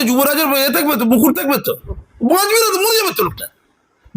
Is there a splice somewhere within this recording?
yes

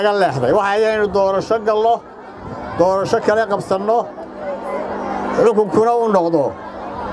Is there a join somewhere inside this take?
no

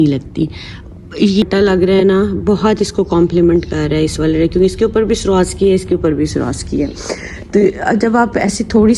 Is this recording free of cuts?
no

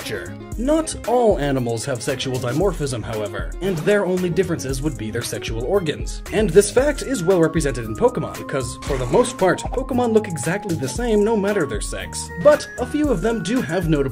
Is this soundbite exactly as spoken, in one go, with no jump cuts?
no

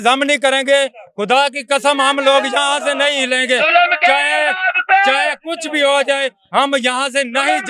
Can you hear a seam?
no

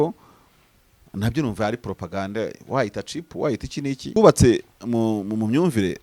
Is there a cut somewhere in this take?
yes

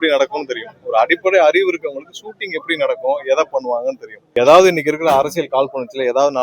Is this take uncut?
no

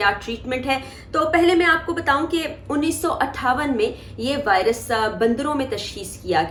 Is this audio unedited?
yes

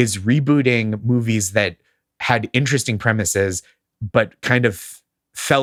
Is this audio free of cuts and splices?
yes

